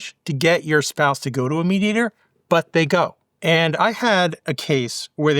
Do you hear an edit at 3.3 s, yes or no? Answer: yes